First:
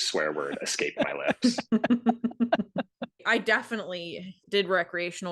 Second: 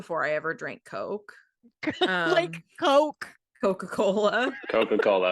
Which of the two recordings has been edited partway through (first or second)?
first